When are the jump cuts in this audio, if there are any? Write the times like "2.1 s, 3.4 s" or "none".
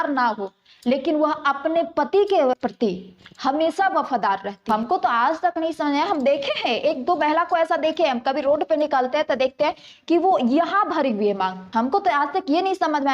2.6 s, 4.5 s, 11.6 s